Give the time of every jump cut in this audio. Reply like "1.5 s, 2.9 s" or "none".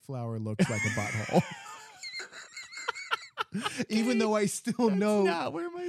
none

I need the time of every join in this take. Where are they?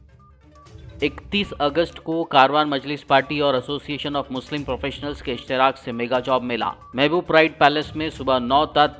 1.0 s

